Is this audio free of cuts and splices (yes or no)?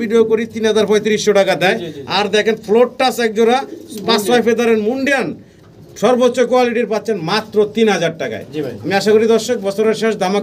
yes